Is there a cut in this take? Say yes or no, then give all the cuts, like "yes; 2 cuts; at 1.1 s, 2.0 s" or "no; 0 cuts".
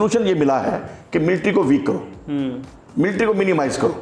no; 0 cuts